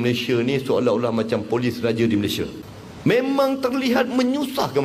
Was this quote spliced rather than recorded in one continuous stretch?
yes; 1 cut; at 2.6 s

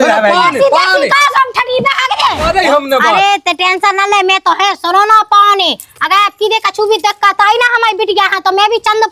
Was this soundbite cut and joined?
yes; 1 cut; at 2.5 s

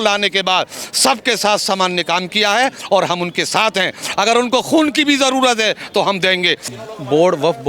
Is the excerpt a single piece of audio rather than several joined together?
no; 1 cut; at 6.7 s

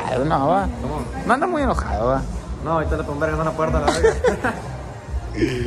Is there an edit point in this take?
no; 0 cuts

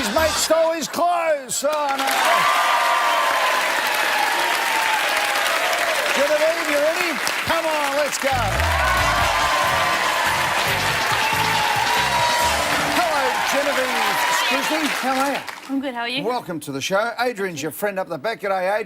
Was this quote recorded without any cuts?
no; 1 cut; at 13.9 s

